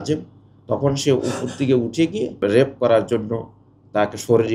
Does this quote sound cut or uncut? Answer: cut